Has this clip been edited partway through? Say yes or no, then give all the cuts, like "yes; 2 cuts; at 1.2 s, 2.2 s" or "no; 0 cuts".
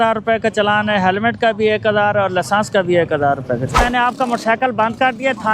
yes; 1 cut; at 3.8 s